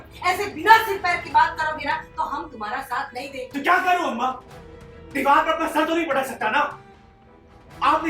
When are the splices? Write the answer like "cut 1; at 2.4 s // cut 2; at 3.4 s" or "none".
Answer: cut 1; at 3.4 s